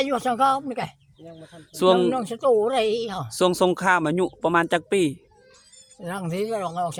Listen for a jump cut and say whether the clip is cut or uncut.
uncut